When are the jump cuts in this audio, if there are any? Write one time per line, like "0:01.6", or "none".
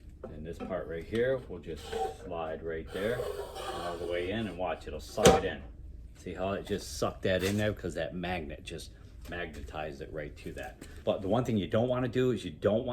0:10.8